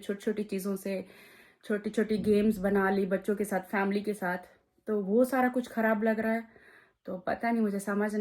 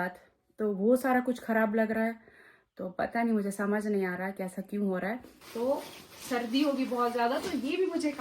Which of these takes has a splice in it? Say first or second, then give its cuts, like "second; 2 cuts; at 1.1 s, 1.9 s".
second; 1 cut; at 5.5 s